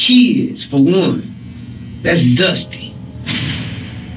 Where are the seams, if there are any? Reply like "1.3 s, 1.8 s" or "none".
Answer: none